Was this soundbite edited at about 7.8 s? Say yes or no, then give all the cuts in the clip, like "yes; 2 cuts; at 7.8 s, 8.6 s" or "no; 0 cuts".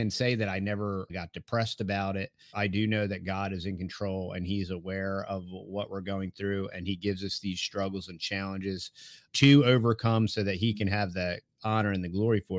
no; 3 cuts; at 1.1 s, 2.5 s, 9.3 s